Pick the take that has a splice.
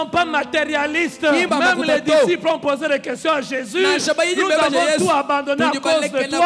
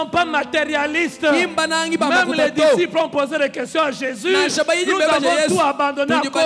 first; 1 cut; at 1.5 s

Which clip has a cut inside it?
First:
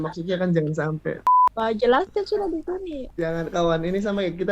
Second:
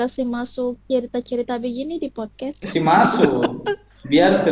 first; 1 cut; at 1.2 s

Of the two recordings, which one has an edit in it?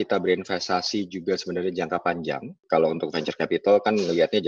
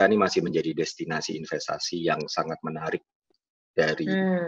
first; 1 cut; at 2.6 s

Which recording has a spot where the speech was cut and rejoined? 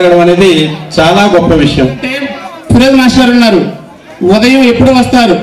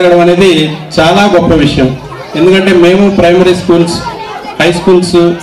first; 1 cut; at 2.4 s

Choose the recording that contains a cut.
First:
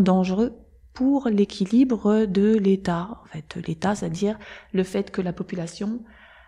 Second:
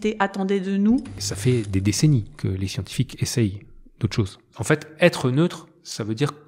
second; 2 cuts; at 1.2 s, 4.5 s

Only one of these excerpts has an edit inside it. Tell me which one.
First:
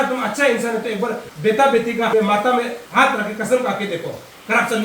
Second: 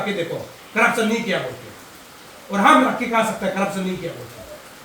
first; 3 cuts; at 1.3 s, 2.1 s, 2.8 s

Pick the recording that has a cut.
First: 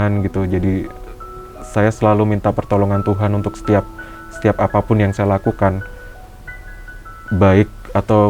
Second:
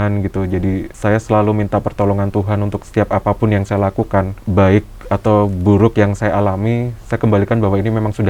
second; 3 cuts; at 0.9 s, 2.8 s, 4.4 s

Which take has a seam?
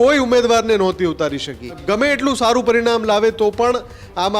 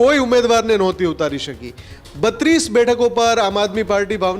first; 1 cut; at 1.8 s

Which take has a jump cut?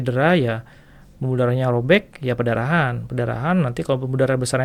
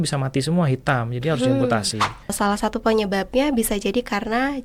second; 1 cut; at 2.3 s

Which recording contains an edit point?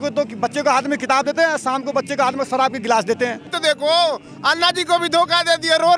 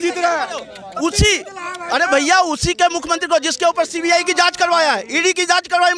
first; 1 cut; at 3.5 s

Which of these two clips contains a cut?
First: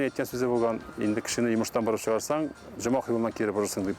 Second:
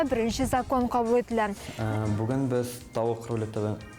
second; 1 cut; at 1.9 s

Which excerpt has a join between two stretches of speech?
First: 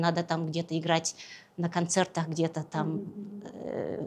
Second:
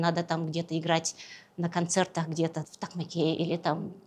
second; 1 cut; at 2.6 s

